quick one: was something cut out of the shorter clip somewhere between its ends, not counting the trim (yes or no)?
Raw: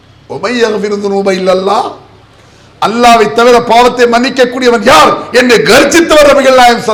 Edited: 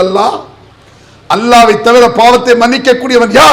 no